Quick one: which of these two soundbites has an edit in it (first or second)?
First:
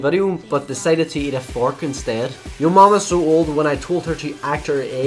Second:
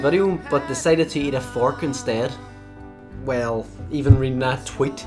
first